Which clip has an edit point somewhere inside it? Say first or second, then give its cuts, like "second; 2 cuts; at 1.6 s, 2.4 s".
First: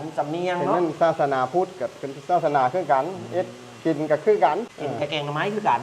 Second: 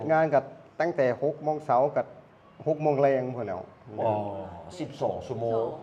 first; 1 cut; at 4.7 s